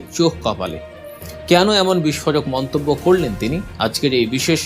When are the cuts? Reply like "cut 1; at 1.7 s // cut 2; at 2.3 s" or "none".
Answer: cut 1; at 3.7 s